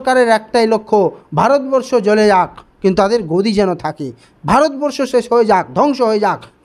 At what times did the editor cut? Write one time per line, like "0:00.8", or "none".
none